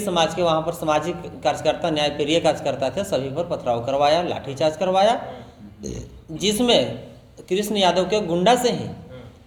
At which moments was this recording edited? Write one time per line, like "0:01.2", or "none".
none